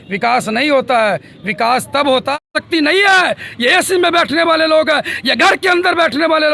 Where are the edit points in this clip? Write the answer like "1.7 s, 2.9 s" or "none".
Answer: 2.5 s